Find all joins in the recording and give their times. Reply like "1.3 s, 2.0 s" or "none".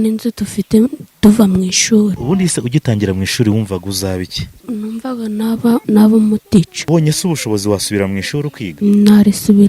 2.2 s, 4.6 s, 5.8 s, 6.8 s, 8.6 s